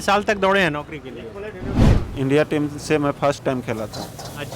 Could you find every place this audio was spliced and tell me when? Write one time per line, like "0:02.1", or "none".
0:02.0